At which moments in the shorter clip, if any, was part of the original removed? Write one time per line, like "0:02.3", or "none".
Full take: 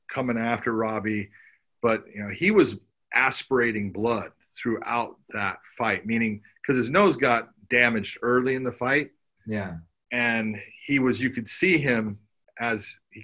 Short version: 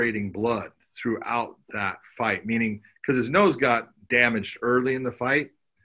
none